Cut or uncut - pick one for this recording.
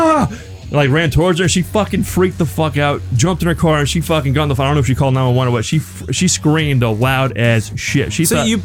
uncut